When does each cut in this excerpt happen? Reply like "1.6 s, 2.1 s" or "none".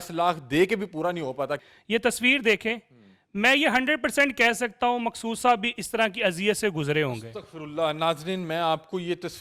1.6 s